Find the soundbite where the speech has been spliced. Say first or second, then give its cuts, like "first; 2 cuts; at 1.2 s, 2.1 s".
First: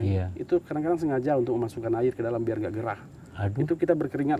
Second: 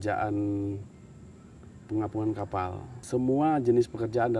second; 1 cut; at 2.9 s